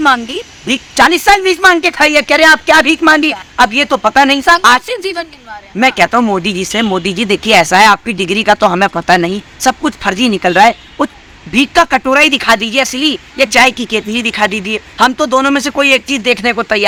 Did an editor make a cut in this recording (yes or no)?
no